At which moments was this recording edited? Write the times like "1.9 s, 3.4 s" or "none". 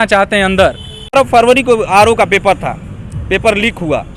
1.1 s